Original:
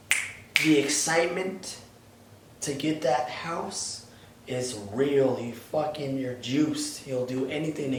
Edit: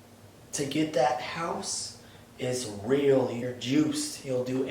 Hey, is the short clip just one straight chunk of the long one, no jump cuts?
no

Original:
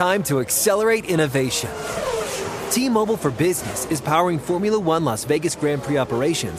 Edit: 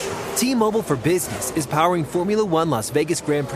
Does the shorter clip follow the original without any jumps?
yes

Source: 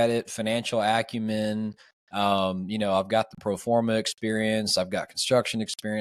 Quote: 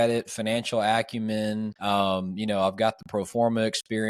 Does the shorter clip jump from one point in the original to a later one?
yes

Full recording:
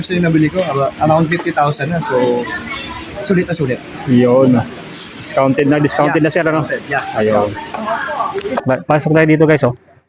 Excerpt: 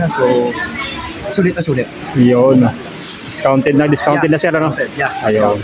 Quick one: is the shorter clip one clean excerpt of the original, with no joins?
yes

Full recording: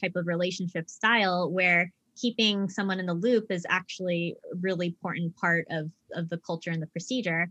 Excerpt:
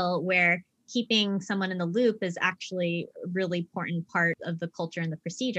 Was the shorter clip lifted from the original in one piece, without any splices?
no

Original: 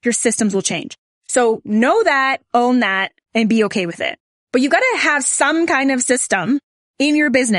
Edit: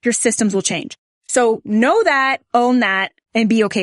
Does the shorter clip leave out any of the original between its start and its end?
no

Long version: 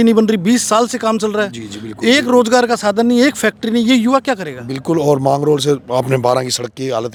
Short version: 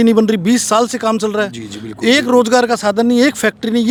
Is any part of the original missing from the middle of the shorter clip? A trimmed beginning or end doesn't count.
no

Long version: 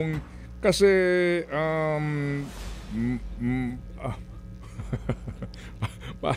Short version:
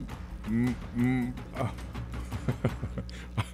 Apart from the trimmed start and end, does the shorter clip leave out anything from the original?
no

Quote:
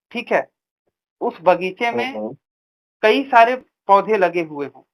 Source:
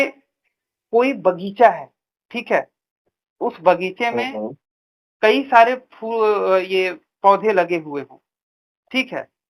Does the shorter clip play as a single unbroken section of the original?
no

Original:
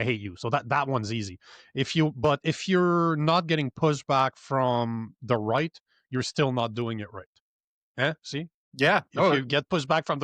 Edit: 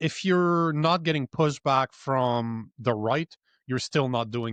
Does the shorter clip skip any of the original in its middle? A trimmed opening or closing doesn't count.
no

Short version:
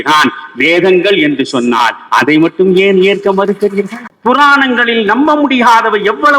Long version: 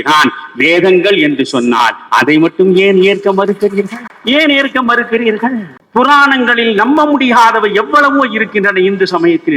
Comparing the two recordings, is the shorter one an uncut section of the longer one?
no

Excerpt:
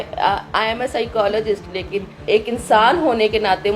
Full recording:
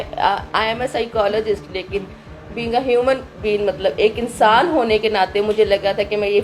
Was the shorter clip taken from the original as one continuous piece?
no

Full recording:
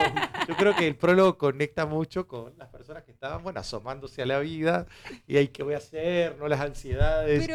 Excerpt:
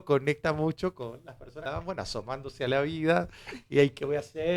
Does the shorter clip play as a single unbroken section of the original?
no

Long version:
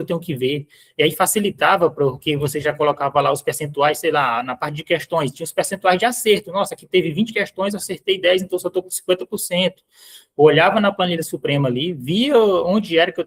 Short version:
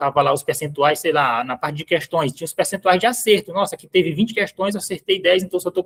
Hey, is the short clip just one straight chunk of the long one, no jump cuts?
yes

